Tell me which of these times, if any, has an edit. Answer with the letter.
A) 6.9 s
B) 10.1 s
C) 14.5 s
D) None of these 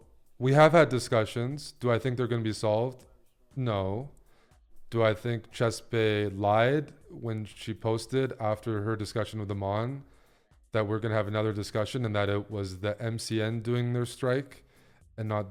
D